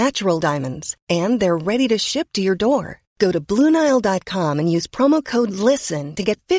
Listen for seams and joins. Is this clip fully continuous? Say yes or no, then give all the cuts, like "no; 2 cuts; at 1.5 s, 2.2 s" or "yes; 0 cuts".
yes; 0 cuts